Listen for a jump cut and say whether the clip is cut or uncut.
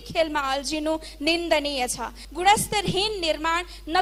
cut